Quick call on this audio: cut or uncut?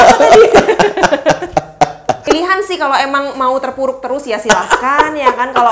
cut